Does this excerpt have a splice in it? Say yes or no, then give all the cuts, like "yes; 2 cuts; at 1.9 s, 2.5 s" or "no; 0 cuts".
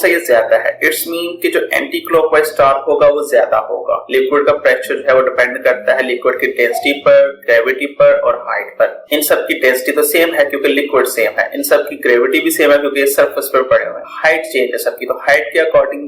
yes; 2 cuts; at 4.0 s, 14.0 s